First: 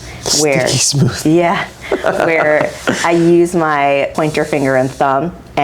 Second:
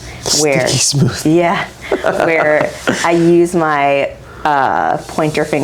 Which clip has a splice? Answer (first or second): first